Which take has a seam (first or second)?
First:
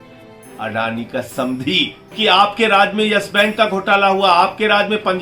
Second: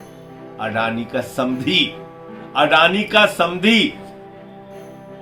first